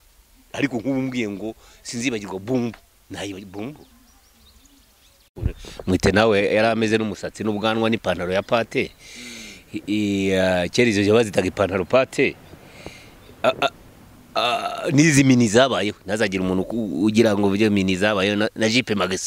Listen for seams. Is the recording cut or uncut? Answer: cut